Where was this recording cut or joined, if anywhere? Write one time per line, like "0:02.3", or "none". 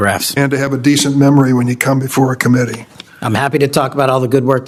none